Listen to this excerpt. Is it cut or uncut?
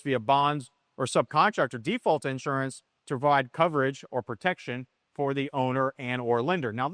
uncut